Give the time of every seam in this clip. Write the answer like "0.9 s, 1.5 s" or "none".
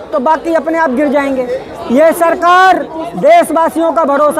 1.7 s